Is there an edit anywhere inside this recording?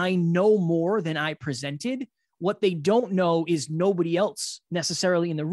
no; 0 cuts

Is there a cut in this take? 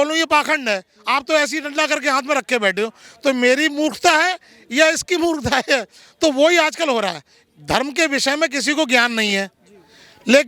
no; 0 cuts

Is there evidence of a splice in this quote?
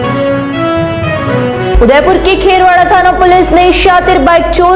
yes; 1 cut; at 1.2 s

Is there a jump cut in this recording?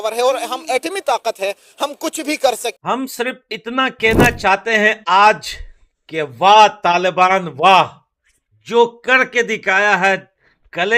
yes; 1 cut; at 2.8 s

